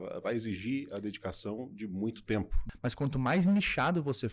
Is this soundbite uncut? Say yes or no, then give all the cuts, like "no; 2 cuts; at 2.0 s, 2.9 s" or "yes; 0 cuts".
no; 1 cut; at 2.6 s